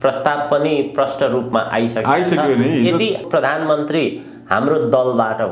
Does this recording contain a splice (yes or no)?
yes